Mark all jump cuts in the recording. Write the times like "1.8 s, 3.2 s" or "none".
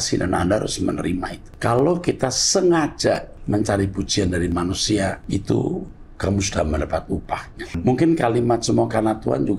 1.5 s, 3.3 s, 5.2 s, 7.8 s